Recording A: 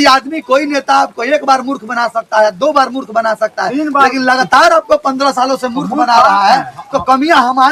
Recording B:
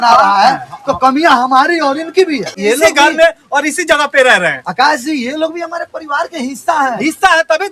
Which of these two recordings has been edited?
B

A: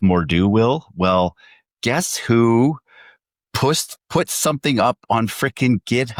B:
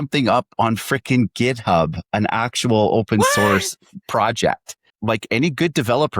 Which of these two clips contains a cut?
B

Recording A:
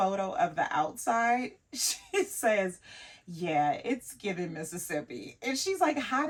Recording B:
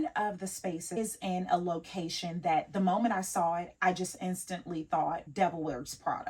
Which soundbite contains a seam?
B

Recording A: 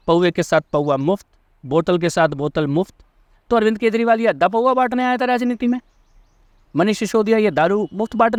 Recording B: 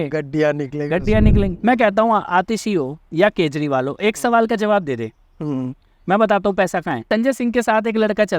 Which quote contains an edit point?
B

